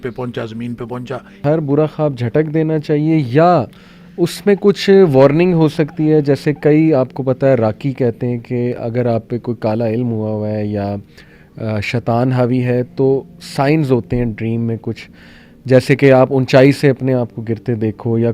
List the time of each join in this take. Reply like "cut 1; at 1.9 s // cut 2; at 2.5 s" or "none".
cut 1; at 1.4 s